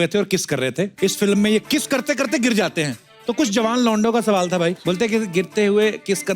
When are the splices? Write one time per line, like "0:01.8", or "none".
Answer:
0:00.9
0:01.6